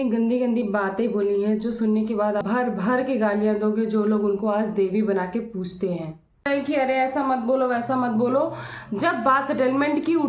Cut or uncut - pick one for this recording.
cut